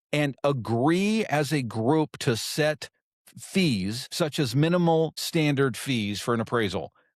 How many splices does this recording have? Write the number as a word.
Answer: two